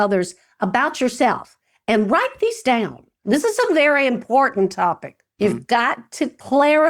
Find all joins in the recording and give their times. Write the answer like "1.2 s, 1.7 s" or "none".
3.2 s